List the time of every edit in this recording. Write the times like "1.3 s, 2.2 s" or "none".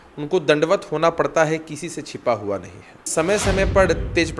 3.0 s